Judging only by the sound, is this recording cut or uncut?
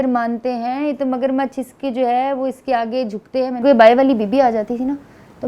cut